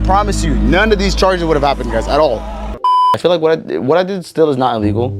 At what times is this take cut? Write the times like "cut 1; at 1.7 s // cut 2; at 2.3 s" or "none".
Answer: cut 1; at 2.9 s